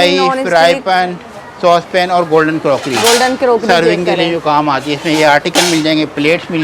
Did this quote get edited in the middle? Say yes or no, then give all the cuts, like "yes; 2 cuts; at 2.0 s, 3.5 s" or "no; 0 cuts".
no; 0 cuts